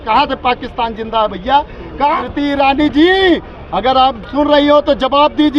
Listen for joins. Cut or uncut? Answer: cut